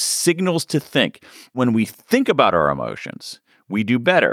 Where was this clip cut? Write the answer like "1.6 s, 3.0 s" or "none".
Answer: 1.5 s